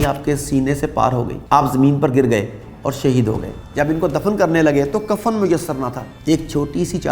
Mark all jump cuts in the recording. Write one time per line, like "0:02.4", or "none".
0:01.3
0:03.6
0:06.1